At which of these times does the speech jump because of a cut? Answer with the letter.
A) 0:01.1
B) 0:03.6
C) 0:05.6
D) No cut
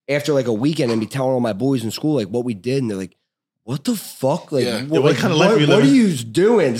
D